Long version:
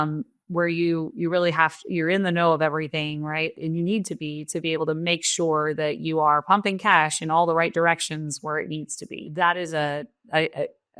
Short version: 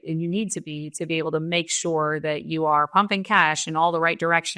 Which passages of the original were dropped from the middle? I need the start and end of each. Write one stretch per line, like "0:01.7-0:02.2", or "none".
none